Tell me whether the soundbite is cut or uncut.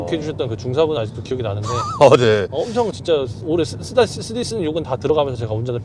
uncut